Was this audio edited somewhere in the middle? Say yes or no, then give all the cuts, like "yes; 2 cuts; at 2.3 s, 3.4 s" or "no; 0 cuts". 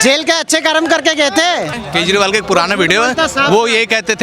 yes; 1 cut; at 1.8 s